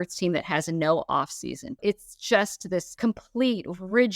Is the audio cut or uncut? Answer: cut